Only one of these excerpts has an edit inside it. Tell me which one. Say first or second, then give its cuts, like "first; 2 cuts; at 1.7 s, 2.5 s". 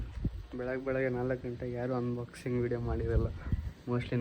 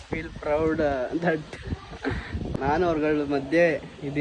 second; 1 cut; at 2.6 s